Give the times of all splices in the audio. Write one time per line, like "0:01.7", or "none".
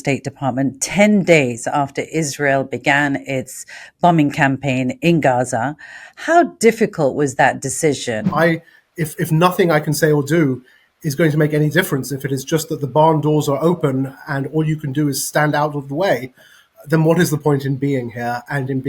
0:08.2